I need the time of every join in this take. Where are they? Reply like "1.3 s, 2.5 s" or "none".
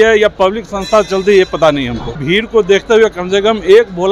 2.2 s